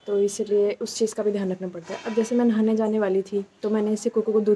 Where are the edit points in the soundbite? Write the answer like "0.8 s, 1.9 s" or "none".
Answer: none